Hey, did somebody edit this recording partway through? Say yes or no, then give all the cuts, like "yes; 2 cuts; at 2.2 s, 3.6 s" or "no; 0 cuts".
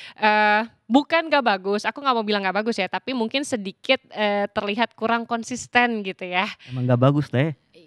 no; 0 cuts